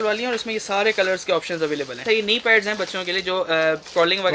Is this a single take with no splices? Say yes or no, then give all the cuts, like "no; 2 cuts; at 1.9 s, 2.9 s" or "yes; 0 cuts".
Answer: no; 1 cut; at 2.0 s